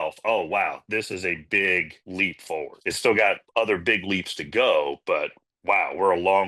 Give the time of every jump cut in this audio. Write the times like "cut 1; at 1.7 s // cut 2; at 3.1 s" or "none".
none